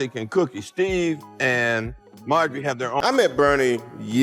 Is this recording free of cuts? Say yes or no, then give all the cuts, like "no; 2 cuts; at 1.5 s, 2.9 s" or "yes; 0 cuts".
no; 1 cut; at 3.0 s